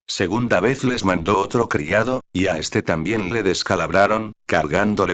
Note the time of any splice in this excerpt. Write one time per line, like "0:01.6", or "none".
0:01.2